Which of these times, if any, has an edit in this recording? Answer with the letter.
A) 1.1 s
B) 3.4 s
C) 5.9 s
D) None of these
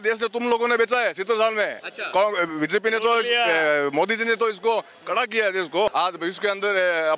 C